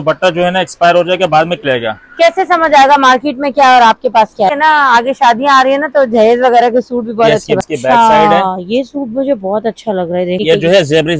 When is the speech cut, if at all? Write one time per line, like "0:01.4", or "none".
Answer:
0:01.6
0:04.5
0:07.6
0:10.4